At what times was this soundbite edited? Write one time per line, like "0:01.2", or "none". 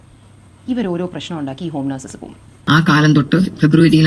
0:02.5